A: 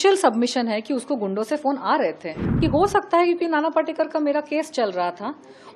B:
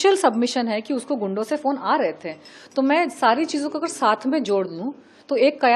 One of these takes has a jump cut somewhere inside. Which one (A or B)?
A